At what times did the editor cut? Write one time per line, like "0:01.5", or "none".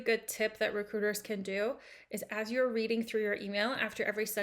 none